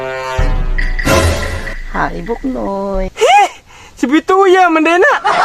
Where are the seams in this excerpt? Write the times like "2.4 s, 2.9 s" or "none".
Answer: 3.1 s